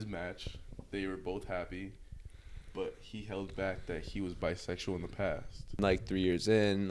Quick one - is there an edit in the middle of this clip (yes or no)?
yes